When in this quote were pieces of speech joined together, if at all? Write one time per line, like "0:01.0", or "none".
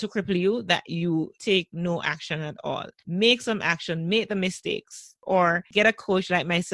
0:05.4